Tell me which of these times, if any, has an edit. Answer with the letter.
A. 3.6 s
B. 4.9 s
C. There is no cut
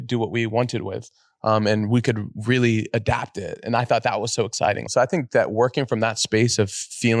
B